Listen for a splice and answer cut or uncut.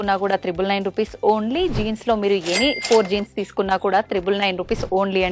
uncut